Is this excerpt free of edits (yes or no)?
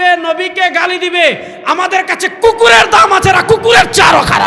yes